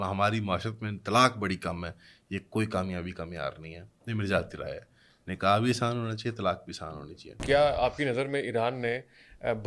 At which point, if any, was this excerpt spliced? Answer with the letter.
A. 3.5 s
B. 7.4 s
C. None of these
B